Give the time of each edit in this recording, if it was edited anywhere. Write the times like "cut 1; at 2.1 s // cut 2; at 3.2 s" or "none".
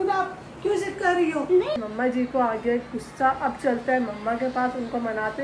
cut 1; at 1.8 s